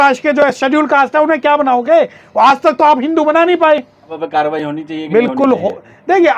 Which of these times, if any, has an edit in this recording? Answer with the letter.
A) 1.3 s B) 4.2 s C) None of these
B